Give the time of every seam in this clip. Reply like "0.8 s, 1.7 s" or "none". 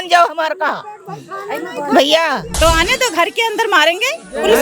2.5 s